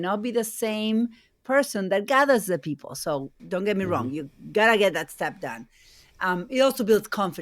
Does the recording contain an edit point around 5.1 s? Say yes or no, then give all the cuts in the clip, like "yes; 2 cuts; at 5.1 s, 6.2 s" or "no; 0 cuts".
no; 1 cut; at 3.4 s